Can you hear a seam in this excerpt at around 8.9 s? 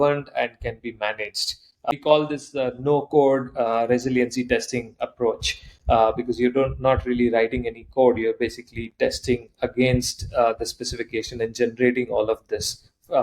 no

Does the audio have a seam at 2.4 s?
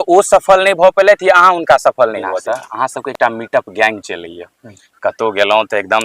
yes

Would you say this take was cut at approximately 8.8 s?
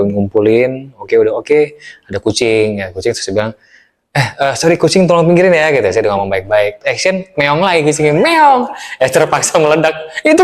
no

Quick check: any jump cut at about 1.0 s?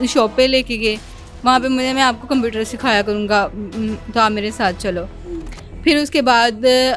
no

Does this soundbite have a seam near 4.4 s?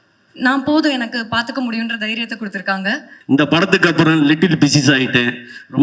no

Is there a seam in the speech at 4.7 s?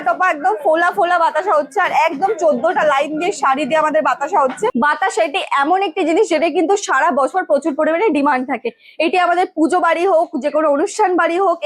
yes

